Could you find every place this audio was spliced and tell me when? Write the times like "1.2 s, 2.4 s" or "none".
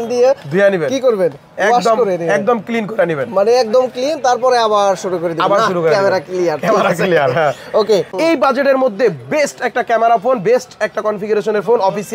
none